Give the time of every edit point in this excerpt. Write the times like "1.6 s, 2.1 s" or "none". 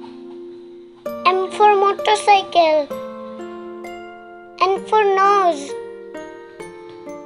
1.2 s, 6.3 s